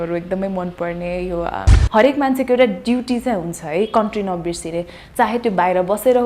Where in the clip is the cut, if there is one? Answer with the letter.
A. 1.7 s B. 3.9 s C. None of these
A